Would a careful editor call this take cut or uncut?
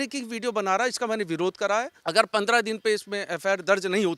cut